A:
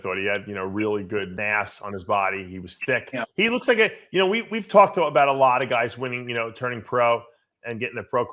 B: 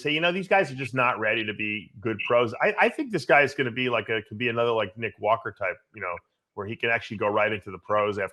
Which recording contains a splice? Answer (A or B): A